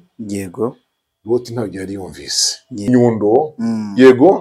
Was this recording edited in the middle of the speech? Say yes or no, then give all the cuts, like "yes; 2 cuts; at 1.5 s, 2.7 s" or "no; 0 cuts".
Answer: yes; 1 cut; at 2.9 s